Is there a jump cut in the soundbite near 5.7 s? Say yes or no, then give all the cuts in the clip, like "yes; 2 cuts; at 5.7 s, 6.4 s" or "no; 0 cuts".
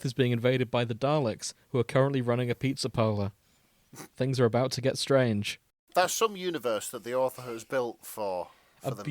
yes; 1 cut; at 5.7 s